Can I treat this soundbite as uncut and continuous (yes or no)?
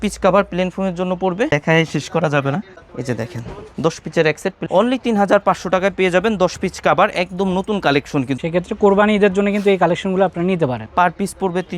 no